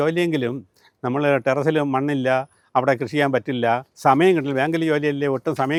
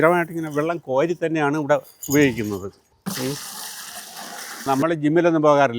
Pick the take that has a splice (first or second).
second